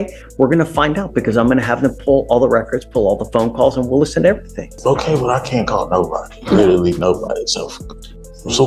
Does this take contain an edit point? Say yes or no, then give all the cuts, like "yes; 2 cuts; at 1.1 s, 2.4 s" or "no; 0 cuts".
yes; 1 cut; at 4.7 s